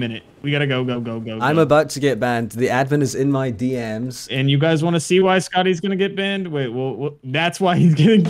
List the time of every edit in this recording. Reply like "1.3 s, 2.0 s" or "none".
1.4 s, 4.5 s